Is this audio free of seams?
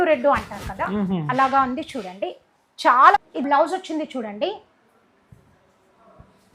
no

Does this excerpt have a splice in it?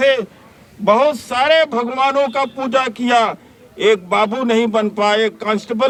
no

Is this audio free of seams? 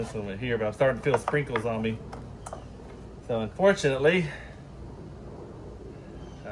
yes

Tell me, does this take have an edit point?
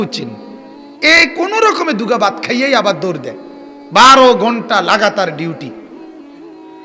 yes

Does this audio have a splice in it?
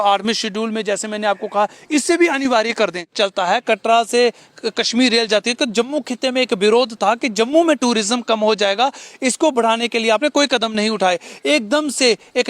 yes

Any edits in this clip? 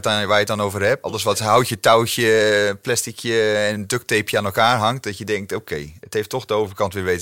yes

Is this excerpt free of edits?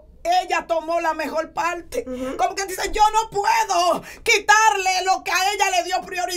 yes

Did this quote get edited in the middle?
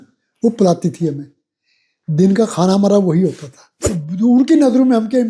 yes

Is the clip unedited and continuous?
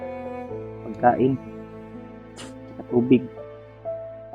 no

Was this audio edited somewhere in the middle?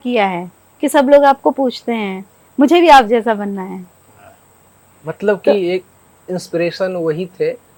no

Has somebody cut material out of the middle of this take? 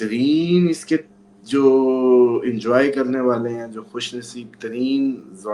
no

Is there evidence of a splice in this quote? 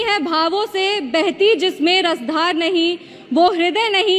no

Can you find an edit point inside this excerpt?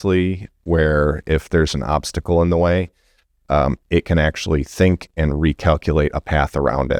no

